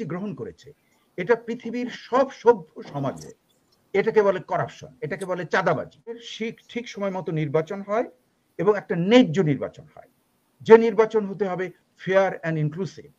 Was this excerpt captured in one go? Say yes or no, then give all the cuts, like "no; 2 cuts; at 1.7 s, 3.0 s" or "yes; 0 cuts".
no; 1 cut; at 6.3 s